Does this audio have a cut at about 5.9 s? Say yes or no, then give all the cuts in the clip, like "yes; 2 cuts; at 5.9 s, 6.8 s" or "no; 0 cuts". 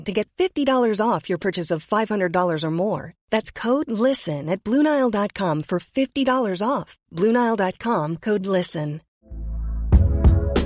no; 1 cut; at 9.1 s